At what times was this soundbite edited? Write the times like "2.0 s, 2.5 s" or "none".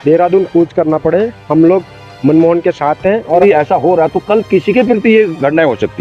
3.4 s

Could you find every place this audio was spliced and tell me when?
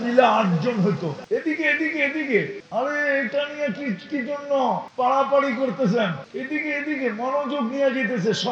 1.2 s, 2.6 s, 4.9 s, 6.2 s

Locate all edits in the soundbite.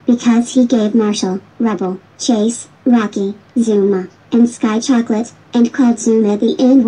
1.1 s

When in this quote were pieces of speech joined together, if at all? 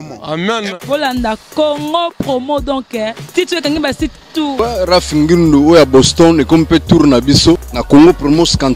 4.5 s, 7.7 s

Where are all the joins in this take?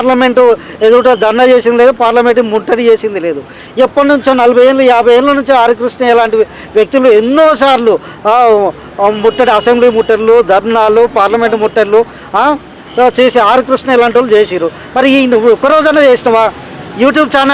none

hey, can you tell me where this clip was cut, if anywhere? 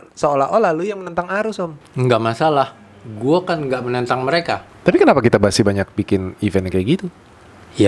1.8 s, 4.7 s

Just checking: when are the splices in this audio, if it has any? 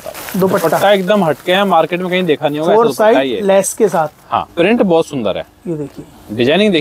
4.5 s

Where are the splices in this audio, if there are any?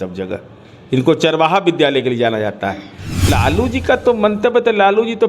3.3 s

